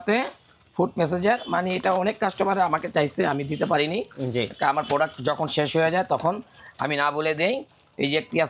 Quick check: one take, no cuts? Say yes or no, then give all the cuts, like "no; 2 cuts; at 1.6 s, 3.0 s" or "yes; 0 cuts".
yes; 0 cuts